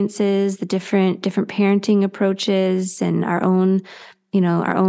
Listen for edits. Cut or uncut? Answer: uncut